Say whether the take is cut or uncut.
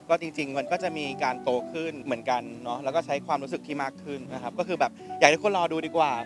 cut